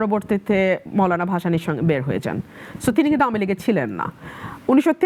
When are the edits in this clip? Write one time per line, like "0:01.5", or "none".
none